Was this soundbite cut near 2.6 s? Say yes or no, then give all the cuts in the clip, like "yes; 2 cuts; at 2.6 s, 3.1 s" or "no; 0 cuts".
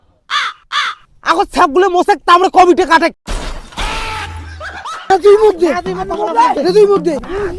no; 1 cut; at 5.1 s